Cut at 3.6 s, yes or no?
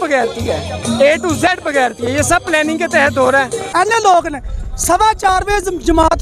yes